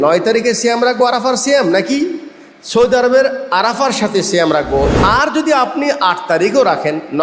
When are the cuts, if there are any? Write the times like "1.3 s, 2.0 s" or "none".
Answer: 4.9 s